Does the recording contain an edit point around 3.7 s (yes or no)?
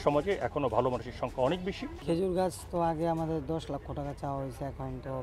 no